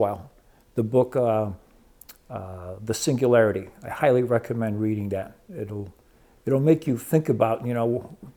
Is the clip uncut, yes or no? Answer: yes